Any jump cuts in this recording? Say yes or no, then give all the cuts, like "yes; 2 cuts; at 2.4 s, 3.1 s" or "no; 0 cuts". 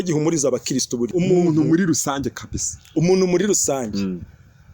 yes; 1 cut; at 1.1 s